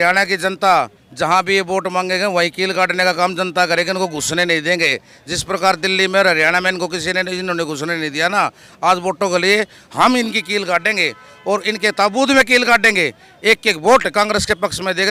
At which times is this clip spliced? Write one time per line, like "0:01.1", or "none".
none